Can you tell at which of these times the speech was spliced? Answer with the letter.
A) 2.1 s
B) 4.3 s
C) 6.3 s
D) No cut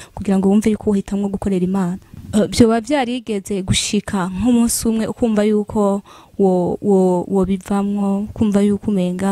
A